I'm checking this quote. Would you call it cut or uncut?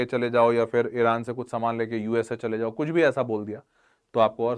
uncut